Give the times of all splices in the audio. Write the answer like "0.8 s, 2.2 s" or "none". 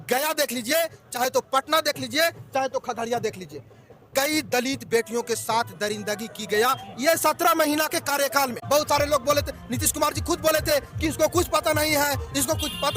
8.6 s